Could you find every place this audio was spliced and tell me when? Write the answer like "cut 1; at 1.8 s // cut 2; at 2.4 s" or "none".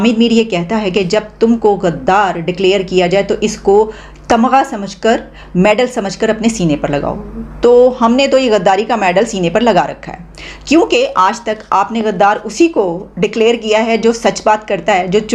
none